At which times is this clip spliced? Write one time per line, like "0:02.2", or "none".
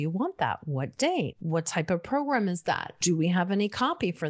0:01.4
0:03.0